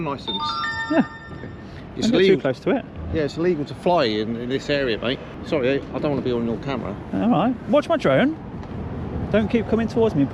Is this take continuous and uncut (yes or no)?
no